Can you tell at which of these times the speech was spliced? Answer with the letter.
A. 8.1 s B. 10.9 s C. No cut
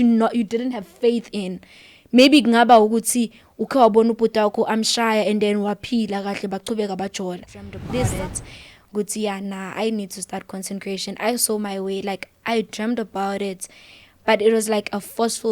A